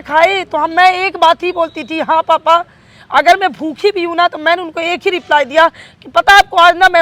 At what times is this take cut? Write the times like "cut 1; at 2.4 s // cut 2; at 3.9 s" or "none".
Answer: none

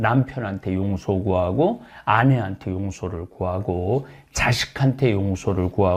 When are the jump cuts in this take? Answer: none

